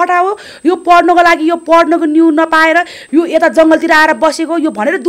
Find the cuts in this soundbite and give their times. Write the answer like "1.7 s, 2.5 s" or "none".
none